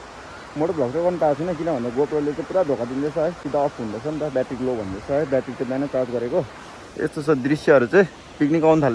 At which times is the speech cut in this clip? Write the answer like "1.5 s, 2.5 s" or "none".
none